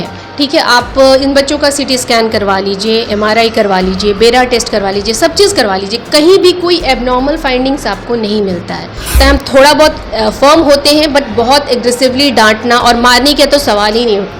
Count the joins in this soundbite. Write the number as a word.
one